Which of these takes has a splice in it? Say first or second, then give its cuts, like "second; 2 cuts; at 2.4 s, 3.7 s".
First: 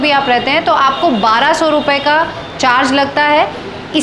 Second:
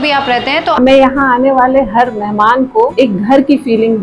second; 2 cuts; at 0.8 s, 2.9 s